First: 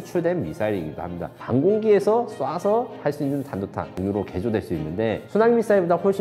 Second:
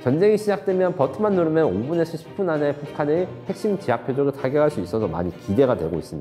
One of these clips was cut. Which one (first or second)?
first